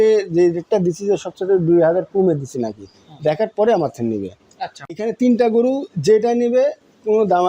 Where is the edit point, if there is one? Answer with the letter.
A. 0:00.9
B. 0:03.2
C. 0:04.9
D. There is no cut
C